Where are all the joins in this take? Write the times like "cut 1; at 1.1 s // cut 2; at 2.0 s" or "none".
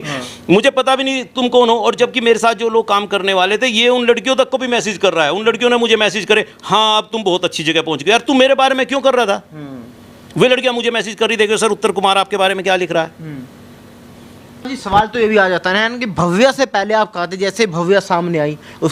cut 1; at 14.7 s